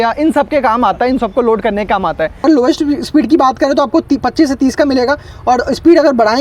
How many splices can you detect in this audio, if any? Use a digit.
1